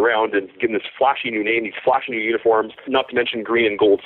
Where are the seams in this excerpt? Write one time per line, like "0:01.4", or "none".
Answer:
0:02.9